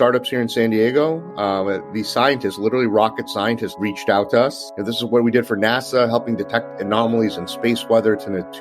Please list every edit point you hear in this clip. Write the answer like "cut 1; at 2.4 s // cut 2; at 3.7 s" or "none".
cut 1; at 3.7 s